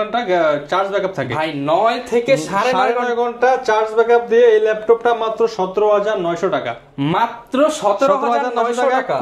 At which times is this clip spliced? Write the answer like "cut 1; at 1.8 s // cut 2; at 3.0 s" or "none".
none